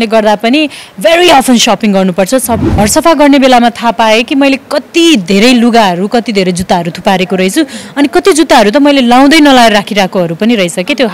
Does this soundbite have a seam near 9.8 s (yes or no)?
no